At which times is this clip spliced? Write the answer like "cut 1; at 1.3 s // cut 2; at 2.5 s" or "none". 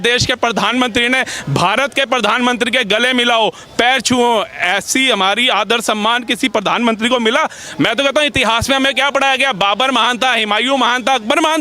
cut 1; at 7.6 s